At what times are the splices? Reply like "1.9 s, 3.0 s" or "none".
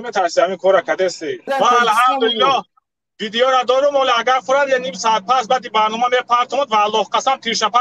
1.5 s